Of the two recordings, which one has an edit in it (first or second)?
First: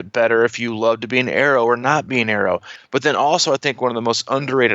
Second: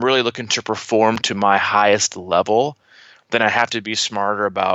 first